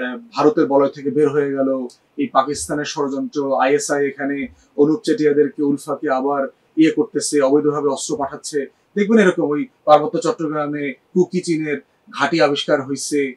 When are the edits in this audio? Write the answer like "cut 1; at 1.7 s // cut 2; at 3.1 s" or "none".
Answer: none